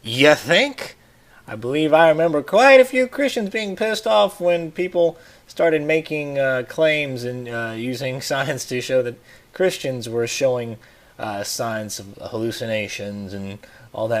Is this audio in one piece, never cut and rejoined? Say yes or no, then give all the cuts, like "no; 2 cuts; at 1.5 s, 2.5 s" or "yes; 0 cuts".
no; 1 cut; at 12.7 s